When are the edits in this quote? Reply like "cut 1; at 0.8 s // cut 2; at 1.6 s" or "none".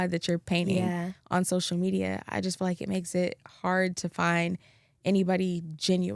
none